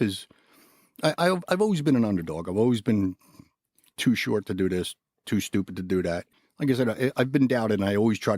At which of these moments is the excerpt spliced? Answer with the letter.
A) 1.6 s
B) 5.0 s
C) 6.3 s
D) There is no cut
C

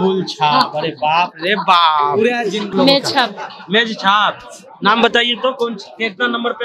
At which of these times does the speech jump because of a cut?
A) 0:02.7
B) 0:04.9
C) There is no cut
A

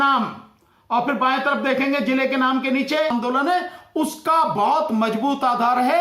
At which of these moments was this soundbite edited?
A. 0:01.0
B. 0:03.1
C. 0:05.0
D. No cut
B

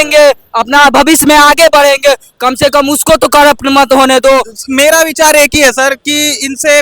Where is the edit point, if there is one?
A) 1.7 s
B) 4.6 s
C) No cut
B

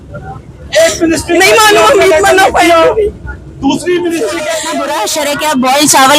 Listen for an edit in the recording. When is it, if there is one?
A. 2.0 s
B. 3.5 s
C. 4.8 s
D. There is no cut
C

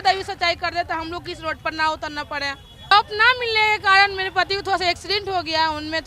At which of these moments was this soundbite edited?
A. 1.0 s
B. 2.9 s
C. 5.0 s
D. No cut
B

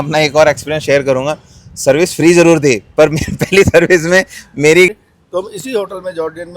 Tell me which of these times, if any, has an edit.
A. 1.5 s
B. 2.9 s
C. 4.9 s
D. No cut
C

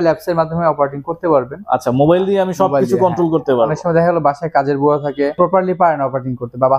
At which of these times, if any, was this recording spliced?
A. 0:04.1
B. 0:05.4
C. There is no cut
B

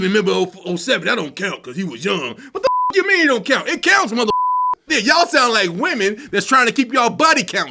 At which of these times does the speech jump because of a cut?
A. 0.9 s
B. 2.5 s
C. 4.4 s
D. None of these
C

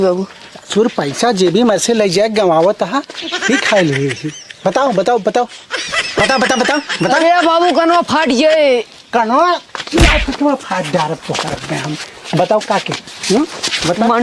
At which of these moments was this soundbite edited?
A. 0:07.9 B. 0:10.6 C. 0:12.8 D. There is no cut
D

